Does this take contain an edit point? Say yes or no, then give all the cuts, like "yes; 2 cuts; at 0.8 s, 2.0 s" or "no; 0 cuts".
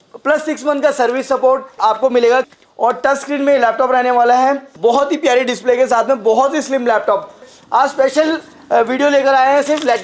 yes; 4 cuts; at 1.7 s, 2.5 s, 4.7 s, 7.5 s